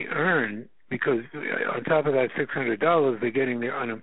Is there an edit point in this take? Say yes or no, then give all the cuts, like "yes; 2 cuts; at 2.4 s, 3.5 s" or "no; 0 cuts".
no; 0 cuts